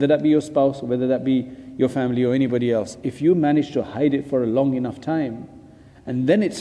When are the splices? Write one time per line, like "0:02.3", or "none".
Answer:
none